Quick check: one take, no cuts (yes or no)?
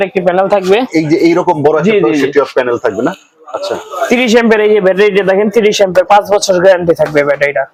yes